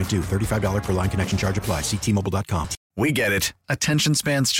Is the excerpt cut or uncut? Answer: cut